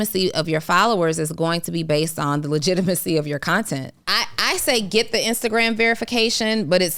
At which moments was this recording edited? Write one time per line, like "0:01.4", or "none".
0:04.0